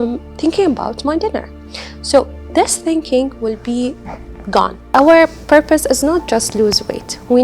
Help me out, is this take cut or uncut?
cut